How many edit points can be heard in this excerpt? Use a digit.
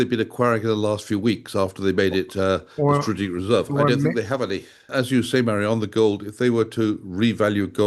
1